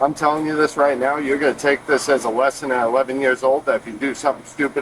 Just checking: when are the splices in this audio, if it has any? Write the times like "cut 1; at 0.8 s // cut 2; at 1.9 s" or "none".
cut 1; at 0.9 s